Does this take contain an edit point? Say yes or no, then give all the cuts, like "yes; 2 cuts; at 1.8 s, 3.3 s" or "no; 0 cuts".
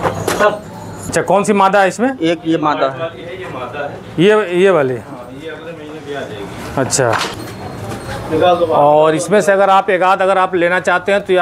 yes; 2 cuts; at 1.0 s, 7.4 s